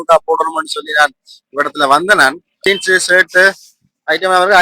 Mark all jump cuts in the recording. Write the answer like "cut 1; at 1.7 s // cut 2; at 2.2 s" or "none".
cut 1; at 2.7 s